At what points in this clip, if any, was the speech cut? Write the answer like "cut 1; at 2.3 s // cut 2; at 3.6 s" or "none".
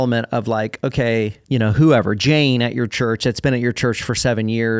cut 1; at 1.4 s